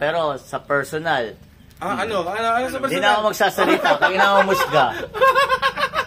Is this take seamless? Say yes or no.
no